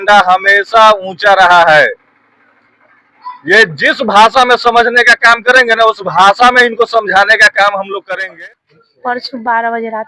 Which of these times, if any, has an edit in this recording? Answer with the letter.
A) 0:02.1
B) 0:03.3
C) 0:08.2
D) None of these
C